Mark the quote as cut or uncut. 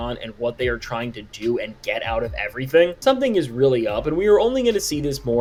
uncut